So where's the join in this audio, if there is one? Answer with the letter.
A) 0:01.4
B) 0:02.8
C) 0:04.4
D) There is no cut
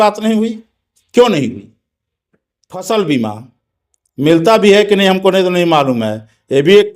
B